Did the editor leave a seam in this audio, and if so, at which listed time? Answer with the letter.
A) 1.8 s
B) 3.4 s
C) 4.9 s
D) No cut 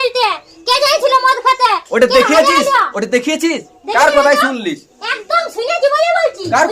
D